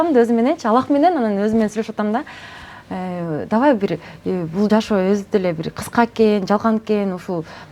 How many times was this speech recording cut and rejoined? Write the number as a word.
zero